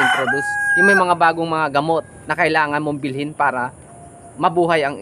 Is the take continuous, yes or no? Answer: no